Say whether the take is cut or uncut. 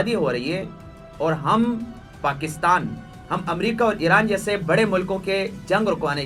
uncut